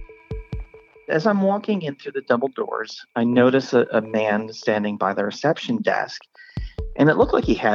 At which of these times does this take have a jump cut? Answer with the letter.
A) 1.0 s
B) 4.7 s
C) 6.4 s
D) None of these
A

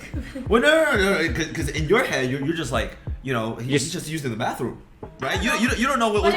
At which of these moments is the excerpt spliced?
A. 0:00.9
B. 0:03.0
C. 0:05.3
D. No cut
D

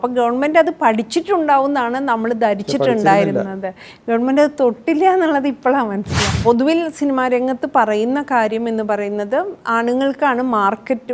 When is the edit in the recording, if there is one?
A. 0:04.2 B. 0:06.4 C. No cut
B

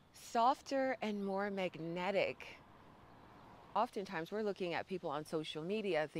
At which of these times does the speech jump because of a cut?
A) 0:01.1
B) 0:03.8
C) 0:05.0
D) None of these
B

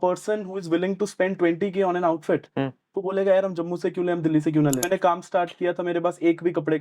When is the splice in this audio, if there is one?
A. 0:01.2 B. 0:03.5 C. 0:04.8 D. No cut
C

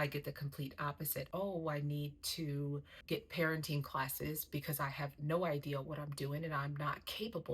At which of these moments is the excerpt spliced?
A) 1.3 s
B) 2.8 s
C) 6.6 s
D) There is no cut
A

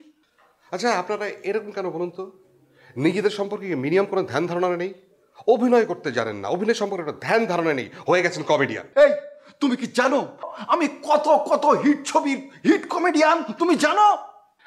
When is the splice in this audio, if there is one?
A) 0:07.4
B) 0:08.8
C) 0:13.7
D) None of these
B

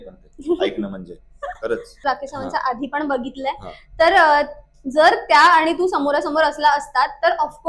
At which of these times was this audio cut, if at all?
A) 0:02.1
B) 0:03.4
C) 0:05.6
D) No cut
A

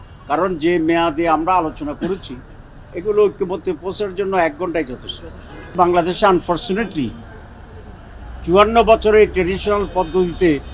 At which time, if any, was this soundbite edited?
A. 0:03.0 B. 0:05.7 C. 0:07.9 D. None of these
B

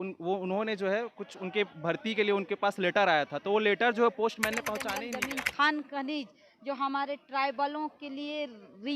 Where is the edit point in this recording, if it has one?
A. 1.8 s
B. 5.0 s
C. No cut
B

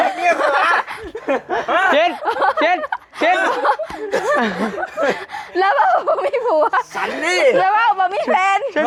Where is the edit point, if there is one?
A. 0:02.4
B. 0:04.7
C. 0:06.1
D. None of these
D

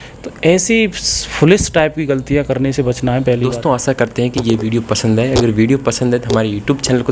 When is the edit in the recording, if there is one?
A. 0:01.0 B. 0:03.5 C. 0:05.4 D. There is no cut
B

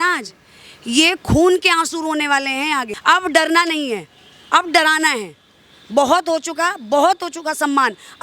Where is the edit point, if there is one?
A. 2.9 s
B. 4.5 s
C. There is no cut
A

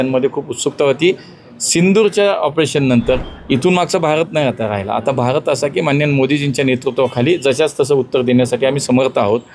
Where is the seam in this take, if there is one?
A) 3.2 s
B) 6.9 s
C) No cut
A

